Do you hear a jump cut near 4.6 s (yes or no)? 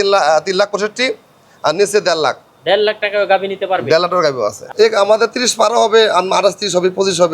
yes